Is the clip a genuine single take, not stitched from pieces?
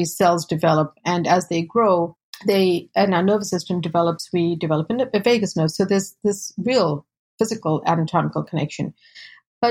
no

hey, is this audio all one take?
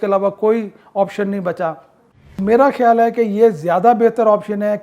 no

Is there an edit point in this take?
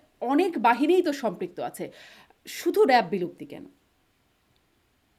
no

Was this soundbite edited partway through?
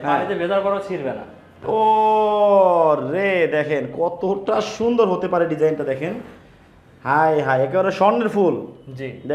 yes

